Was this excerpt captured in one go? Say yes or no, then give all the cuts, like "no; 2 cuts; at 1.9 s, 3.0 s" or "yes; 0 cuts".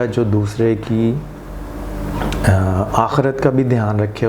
yes; 0 cuts